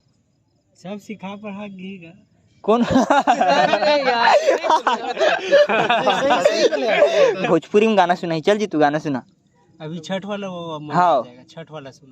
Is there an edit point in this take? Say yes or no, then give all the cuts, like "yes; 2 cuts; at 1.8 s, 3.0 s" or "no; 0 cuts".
yes; 1 cut; at 7.4 s